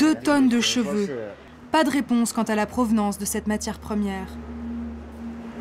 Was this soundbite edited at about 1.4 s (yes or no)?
yes